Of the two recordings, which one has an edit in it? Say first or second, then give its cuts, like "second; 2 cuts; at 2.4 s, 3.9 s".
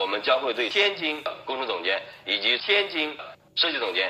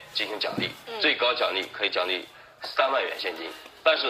second; 1 cut; at 2.1 s